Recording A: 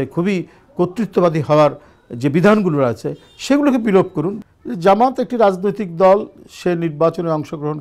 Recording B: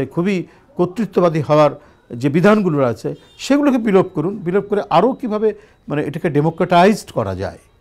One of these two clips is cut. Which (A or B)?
A